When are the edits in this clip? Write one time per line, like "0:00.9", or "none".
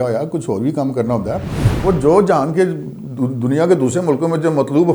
0:01.7